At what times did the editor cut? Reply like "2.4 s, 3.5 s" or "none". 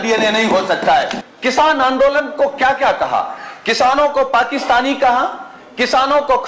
1.2 s